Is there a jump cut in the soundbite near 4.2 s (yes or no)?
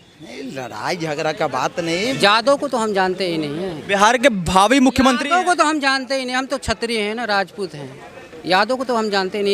no